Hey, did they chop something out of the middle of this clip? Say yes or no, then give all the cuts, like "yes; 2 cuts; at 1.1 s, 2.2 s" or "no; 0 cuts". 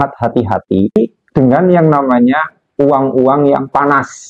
yes; 1 cut; at 1.0 s